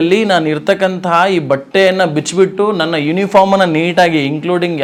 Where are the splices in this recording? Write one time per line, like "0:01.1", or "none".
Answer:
none